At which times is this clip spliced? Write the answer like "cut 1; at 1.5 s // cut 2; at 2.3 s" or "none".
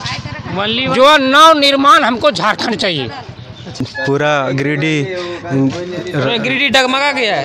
cut 1; at 3.8 s